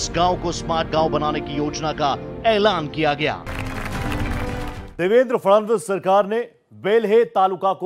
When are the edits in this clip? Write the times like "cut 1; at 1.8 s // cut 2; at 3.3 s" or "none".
cut 1; at 2.3 s // cut 2; at 3.6 s